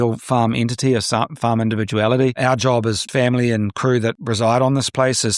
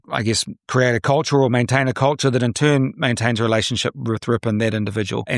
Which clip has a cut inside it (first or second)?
first